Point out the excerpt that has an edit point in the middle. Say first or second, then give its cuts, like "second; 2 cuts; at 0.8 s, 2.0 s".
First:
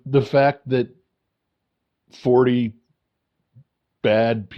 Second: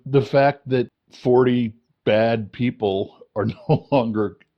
second; 2 cuts; at 1.0 s, 1.8 s